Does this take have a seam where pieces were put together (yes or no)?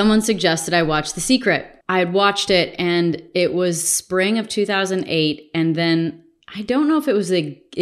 yes